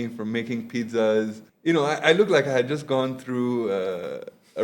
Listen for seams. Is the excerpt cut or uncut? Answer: cut